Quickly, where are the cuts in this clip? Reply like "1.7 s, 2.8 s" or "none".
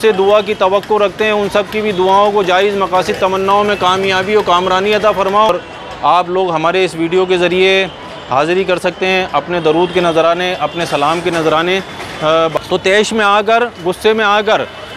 5.5 s, 12.5 s